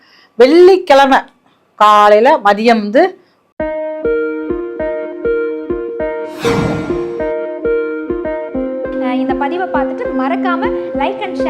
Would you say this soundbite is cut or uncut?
cut